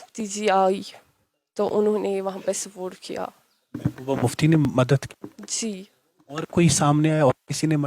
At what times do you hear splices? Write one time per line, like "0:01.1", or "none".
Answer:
none